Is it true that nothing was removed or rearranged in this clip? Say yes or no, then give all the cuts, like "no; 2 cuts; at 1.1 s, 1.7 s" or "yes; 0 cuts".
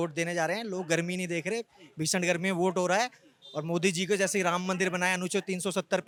yes; 0 cuts